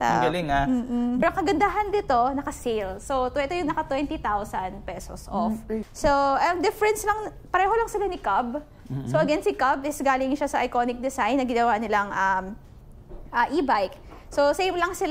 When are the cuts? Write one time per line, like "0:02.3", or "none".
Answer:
0:01.2
0:05.9